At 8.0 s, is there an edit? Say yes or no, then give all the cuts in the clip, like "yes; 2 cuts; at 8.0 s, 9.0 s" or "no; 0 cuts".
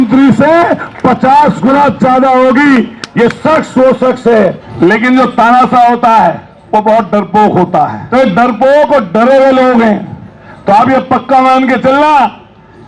yes; 2 cuts; at 4.6 s, 8.0 s